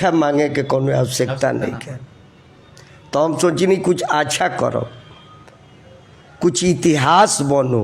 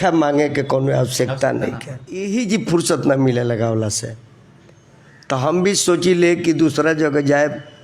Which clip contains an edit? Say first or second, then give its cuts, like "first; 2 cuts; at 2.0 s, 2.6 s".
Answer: second; 1 cut; at 2.3 s